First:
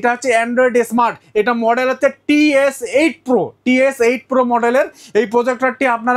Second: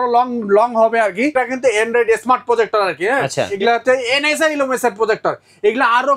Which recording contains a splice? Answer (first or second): second